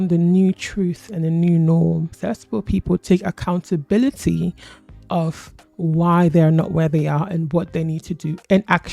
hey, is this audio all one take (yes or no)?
no